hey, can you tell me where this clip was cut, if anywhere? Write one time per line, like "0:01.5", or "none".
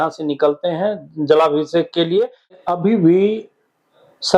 0:02.6